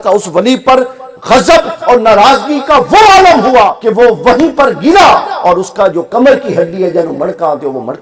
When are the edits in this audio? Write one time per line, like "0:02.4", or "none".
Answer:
0:04.2